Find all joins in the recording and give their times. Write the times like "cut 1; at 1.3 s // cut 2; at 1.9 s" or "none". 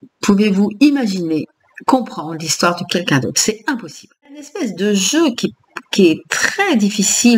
cut 1; at 4.5 s